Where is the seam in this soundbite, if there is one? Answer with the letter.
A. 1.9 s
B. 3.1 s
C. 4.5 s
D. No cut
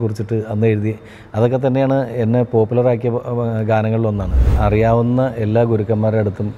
C